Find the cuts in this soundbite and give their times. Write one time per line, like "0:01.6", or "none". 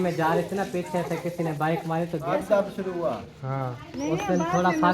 0:02.3

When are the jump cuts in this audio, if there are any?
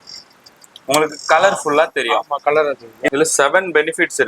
0:03.1

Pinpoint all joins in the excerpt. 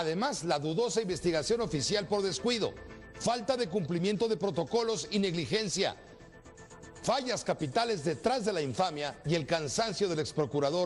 none

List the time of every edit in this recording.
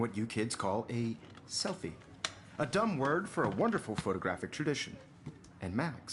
none

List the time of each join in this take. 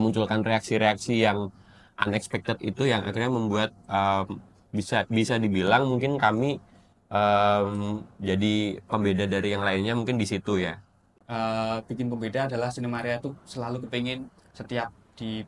0:11.1

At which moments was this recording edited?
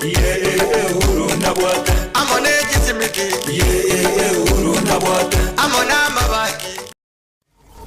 0:06.9

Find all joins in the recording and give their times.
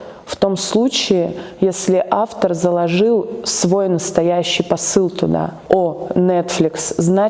0:05.6

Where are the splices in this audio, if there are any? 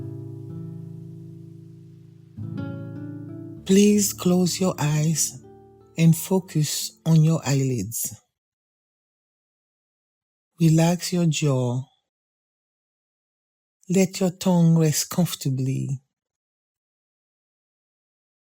0:03.6

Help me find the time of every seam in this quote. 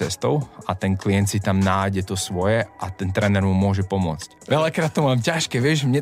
0:04.4

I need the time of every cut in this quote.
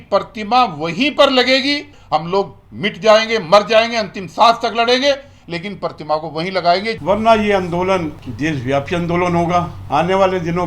0:02.0
0:07.0
0:08.2
0:09.8

